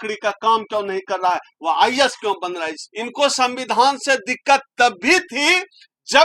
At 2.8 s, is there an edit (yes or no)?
yes